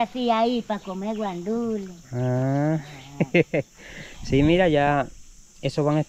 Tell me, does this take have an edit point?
no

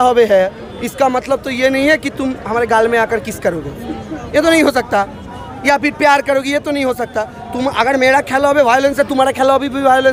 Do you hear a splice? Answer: no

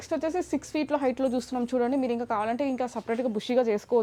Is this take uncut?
yes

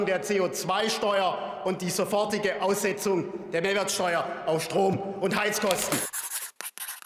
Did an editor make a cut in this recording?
yes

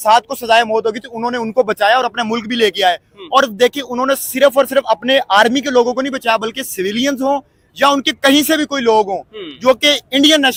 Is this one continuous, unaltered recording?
yes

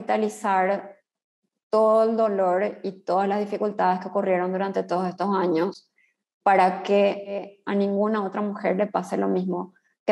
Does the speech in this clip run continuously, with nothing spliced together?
no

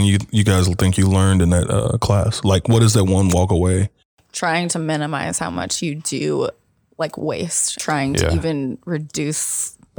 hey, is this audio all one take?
no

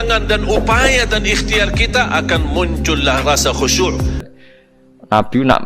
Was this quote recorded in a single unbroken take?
no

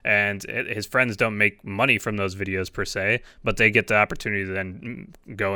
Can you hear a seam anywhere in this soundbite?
no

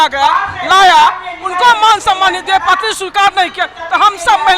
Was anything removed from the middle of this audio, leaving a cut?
no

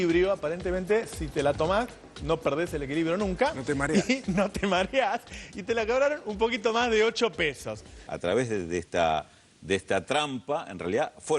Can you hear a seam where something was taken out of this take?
yes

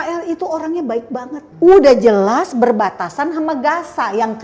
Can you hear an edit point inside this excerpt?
yes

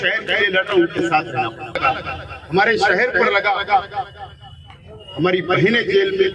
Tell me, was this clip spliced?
yes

